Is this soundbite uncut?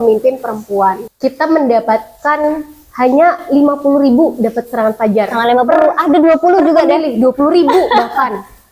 no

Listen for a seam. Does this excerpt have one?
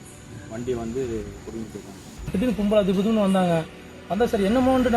yes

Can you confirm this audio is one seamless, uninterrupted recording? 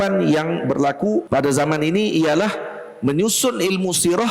no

